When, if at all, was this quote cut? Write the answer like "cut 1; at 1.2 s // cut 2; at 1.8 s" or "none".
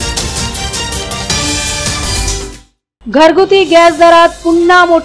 cut 1; at 2.7 s